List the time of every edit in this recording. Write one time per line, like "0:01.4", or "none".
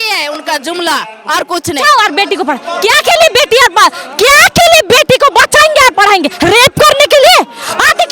0:01.8